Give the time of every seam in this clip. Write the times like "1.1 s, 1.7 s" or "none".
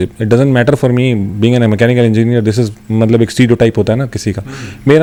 none